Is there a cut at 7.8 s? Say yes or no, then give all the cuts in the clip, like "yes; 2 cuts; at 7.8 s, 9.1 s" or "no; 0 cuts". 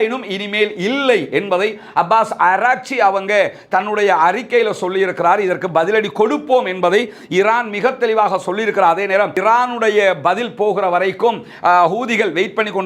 no; 1 cut; at 9.4 s